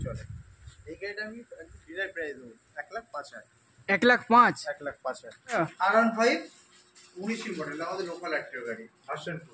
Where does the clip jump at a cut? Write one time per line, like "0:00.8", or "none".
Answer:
0:05.6